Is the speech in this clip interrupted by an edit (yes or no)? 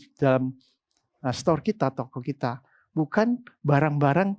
no